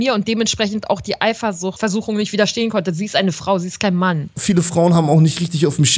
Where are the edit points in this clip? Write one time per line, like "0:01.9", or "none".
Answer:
0:01.7
0:04.3